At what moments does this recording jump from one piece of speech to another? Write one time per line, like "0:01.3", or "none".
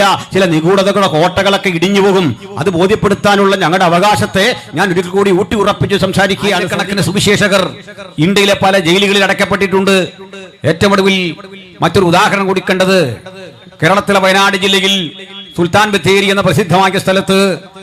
0:06.8